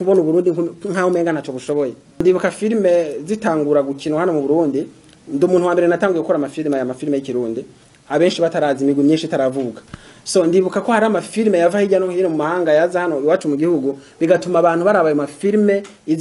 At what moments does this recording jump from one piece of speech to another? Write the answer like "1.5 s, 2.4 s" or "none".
2.2 s

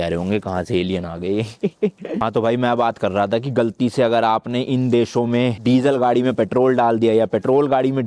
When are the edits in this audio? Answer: none

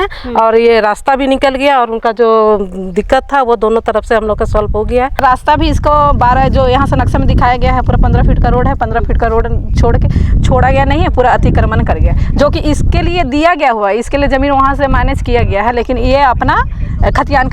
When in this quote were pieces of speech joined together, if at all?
5.2 s

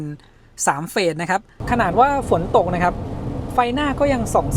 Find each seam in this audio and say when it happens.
1.6 s

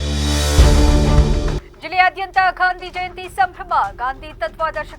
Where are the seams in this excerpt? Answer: 1.5 s

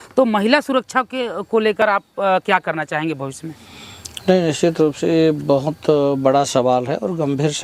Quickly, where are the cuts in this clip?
none

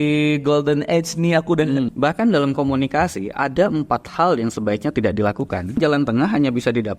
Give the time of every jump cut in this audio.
1.9 s, 5.8 s

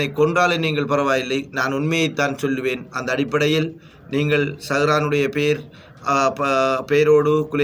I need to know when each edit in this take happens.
none

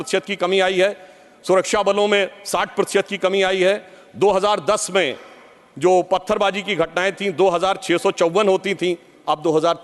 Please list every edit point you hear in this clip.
none

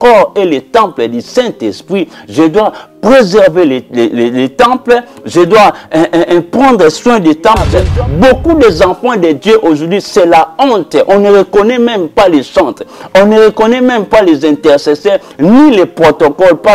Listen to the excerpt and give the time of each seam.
7.7 s

